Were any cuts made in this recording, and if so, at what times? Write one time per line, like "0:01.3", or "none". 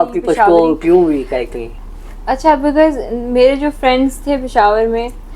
none